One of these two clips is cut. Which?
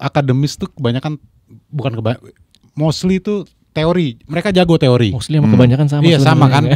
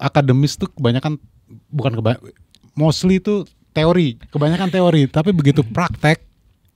second; 1 cut; at 4.2 s

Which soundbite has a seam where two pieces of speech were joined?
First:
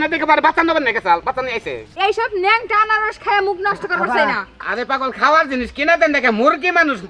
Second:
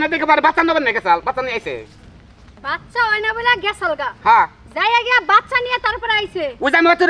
first; 2 cuts; at 1.9 s, 4.6 s

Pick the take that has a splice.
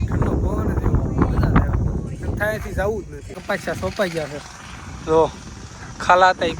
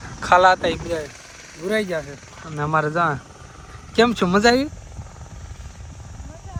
first; 1 cut; at 3.4 s

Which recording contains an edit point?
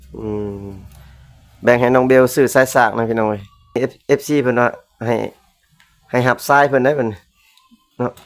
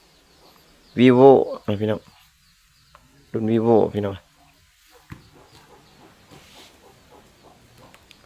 first; 1 cut; at 3.8 s

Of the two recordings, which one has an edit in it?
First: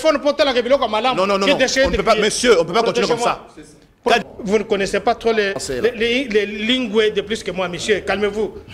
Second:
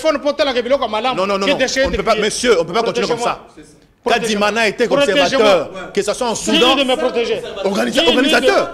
first; 1 cut; at 4.2 s

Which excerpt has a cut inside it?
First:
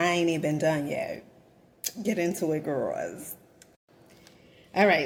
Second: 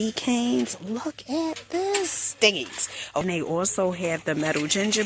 second; 1 cut; at 3.2 s

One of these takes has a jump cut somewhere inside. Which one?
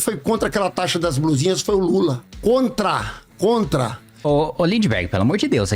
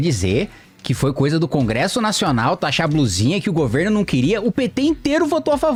first; 2 cuts; at 2.3 s, 4.1 s

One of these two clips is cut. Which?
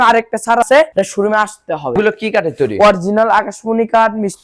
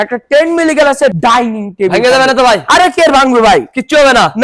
first; 1 cut; at 1.9 s

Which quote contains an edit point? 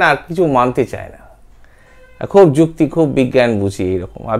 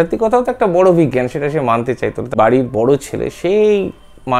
second; 1 cut; at 2.3 s

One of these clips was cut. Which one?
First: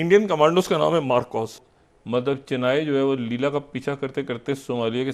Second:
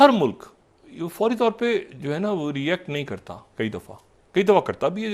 first; 1 cut; at 1.6 s

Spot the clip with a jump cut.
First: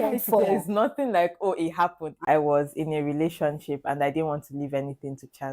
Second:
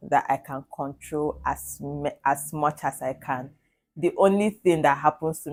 first; 1 cut; at 2.2 s

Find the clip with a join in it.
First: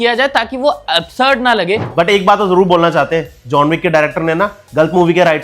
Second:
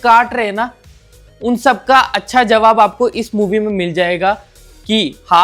first; 1 cut; at 1.9 s

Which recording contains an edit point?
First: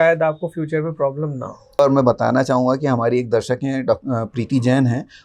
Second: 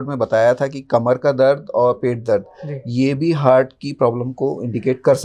first; 1 cut; at 1.8 s

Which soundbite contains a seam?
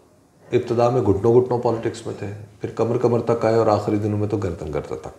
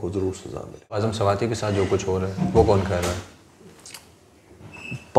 second; 1 cut; at 0.9 s

